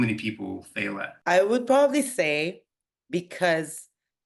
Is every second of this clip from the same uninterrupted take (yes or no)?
no